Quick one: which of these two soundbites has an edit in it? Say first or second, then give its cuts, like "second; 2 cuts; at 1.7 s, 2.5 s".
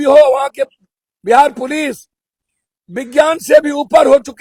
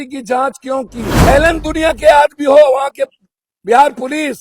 second; 1 cut; at 1.0 s